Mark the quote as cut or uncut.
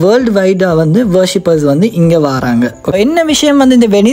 cut